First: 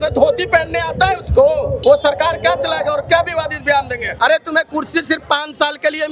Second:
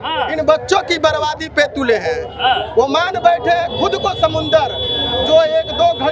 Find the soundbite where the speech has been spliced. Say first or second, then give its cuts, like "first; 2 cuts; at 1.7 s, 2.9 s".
first; 2 cuts; at 1.7 s, 4.0 s